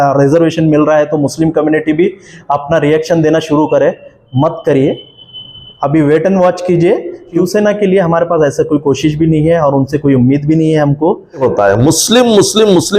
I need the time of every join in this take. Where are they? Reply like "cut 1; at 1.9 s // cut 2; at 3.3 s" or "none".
cut 1; at 7.3 s // cut 2; at 11.4 s